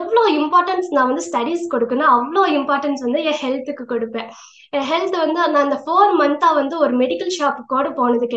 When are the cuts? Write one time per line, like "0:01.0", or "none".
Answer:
none

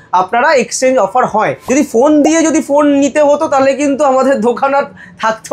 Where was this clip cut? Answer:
0:01.6

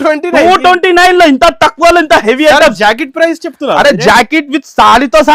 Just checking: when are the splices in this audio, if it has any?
none

